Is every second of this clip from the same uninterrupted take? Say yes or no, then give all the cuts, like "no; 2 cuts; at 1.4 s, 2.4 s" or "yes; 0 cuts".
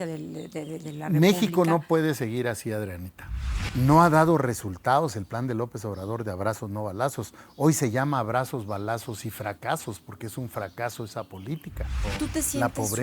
no; 2 cuts; at 3.4 s, 12.1 s